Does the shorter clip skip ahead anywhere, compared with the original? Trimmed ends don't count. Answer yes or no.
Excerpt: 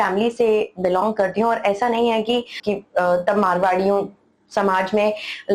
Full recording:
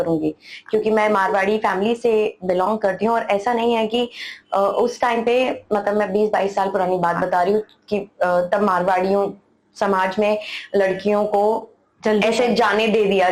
yes